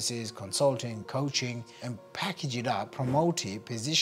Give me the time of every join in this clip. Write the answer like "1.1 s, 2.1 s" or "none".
1.7 s, 2.9 s